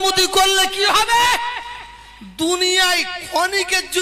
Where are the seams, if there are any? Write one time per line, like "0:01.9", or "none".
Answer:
none